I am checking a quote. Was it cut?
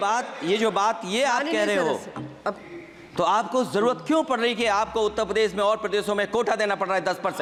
no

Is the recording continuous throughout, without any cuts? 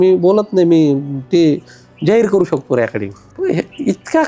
no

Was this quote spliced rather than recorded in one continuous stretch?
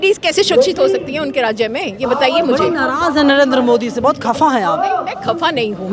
no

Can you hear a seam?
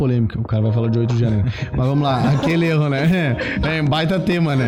no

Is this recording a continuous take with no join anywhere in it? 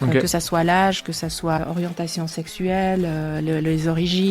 no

